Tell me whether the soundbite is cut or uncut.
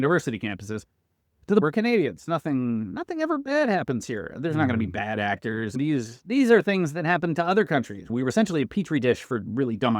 cut